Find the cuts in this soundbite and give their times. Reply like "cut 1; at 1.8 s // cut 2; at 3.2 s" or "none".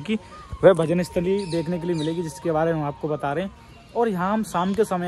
none